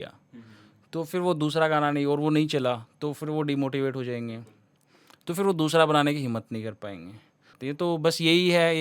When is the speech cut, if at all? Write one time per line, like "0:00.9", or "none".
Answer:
0:07.4